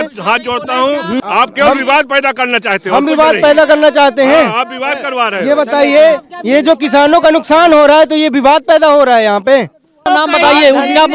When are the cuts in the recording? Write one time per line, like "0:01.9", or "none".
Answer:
0:01.2
0:10.0